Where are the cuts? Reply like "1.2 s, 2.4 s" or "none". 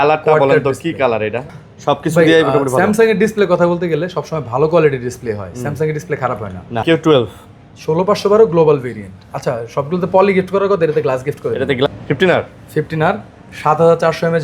1.5 s, 6.8 s, 11.9 s